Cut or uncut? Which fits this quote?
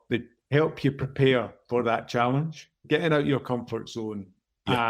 cut